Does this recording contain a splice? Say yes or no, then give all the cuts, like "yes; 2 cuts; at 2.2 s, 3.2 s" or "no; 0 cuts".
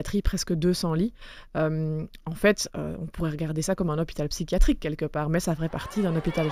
no; 0 cuts